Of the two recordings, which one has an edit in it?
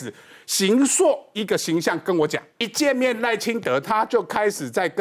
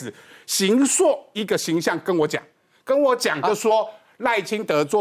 first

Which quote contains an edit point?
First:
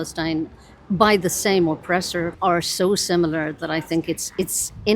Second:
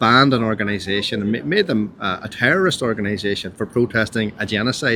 first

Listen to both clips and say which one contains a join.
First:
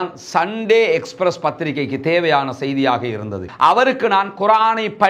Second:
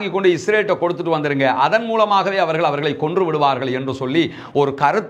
first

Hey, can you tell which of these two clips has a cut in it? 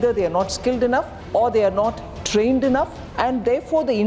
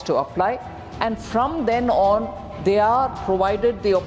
first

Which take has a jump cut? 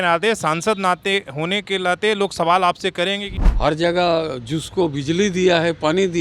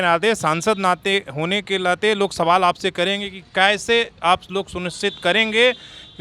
first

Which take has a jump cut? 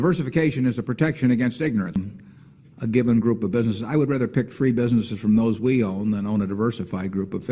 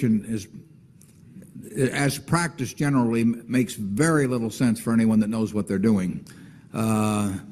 first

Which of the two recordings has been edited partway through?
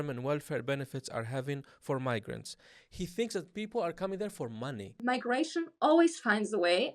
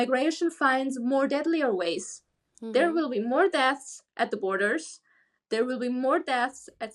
first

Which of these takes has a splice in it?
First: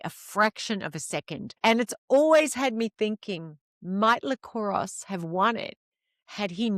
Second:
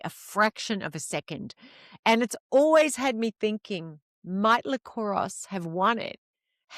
first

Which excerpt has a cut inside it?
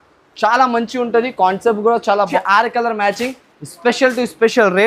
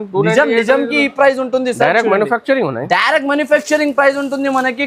first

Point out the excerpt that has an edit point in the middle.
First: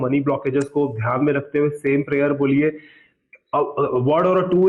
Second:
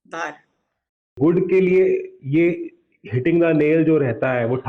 second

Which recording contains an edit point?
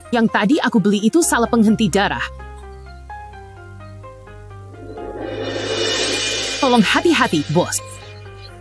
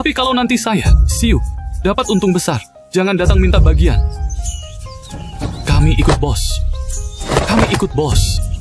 first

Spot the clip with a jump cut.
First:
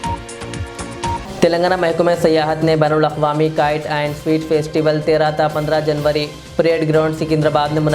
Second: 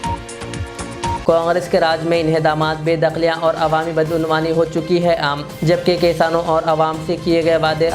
first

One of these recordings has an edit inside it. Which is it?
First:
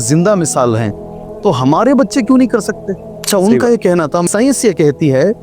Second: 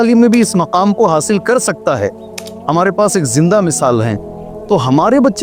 first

